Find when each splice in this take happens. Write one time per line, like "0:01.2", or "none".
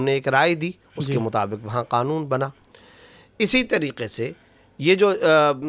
none